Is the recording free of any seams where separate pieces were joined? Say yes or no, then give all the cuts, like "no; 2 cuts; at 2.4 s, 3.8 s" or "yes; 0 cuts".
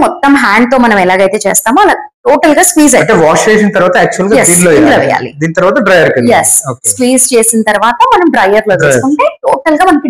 yes; 0 cuts